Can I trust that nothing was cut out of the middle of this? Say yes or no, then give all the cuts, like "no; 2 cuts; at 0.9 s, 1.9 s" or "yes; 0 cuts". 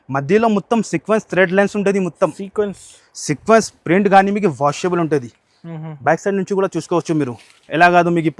yes; 0 cuts